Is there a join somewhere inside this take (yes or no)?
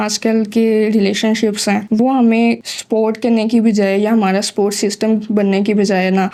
no